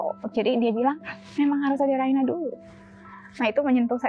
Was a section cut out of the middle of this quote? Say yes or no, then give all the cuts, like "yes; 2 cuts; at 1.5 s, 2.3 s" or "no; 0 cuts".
no; 0 cuts